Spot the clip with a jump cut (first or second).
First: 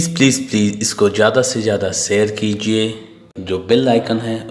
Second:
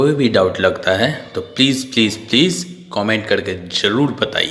first